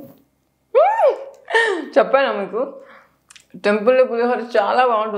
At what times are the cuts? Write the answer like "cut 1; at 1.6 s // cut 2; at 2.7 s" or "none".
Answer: none